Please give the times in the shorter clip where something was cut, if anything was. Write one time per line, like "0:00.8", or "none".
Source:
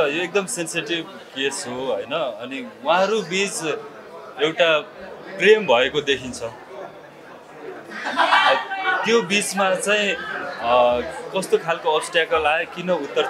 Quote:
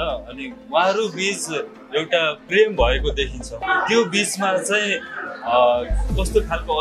0:02.1
0:03.6

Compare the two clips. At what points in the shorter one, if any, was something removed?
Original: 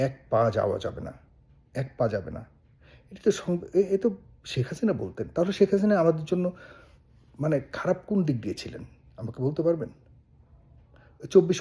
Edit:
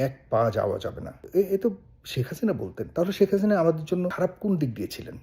0:01.2
0:04.1

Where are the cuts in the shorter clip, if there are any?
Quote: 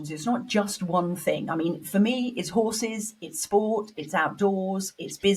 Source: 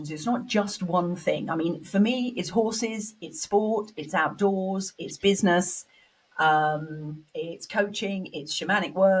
none

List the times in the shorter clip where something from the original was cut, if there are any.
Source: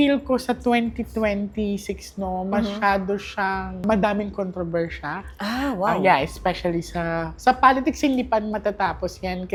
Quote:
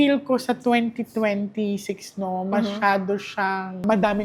none

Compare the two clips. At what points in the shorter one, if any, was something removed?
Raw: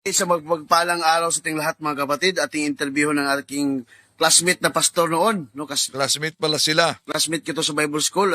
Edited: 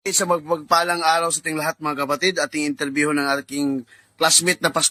none

